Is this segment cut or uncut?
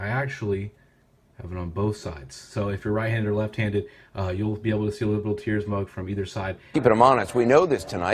uncut